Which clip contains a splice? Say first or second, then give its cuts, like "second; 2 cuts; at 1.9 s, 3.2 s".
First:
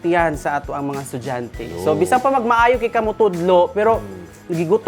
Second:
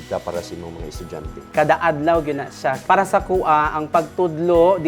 second; 2 cuts; at 1.5 s, 2.8 s